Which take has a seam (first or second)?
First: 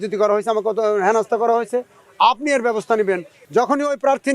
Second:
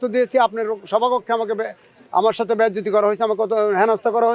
first